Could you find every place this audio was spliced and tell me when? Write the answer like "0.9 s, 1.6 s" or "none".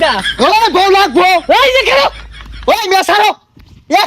2.2 s